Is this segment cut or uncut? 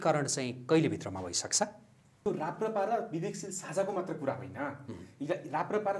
cut